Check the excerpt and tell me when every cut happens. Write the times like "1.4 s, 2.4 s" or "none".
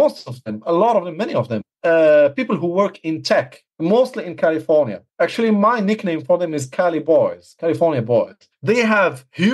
1.7 s, 3.6 s, 5.0 s, 8.4 s